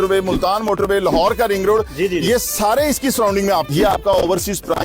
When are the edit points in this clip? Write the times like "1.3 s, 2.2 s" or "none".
3.7 s